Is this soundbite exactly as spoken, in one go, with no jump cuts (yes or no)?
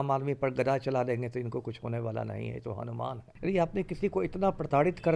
no